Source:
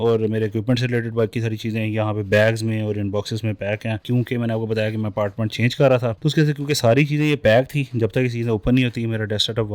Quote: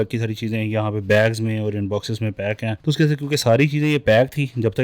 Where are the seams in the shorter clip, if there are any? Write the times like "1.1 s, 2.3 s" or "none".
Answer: 2.8 s